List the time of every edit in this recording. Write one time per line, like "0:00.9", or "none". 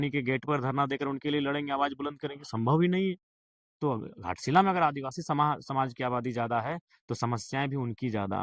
none